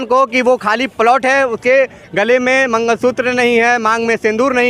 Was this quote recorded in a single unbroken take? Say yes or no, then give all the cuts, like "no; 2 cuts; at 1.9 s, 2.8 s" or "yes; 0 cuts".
yes; 0 cuts